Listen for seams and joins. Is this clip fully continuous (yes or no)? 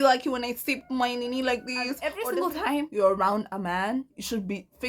no